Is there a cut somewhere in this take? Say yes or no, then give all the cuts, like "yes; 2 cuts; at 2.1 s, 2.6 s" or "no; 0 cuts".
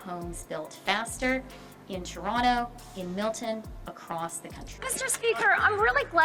yes; 1 cut; at 4.7 s